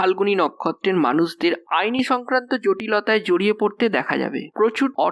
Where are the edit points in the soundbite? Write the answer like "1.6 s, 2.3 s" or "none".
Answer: none